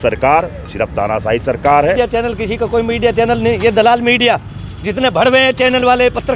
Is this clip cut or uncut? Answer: cut